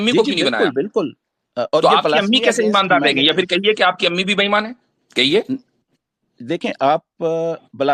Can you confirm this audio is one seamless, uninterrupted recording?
yes; 0 cuts

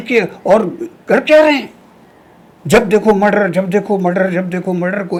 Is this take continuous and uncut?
yes; 0 cuts

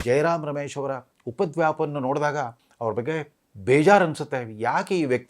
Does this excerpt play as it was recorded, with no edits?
no; 2 cuts; at 1.2 s, 3.0 s

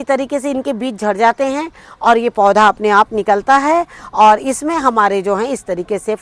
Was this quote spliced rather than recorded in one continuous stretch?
no; 0 cuts

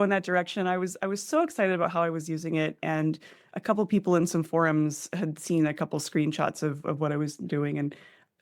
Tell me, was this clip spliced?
no; 0 cuts

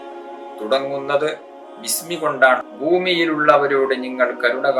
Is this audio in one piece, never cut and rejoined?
no; 1 cut; at 2.6 s

